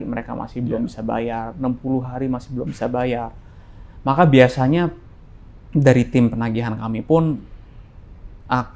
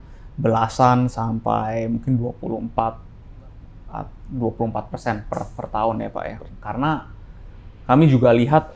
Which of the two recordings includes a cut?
second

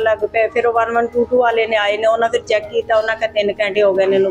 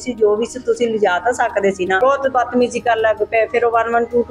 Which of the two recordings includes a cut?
second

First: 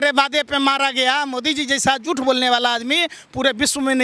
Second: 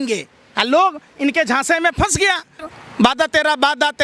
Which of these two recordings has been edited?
second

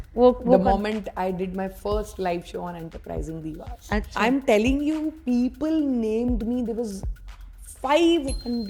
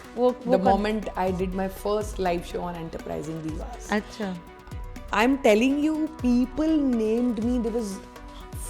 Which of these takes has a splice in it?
first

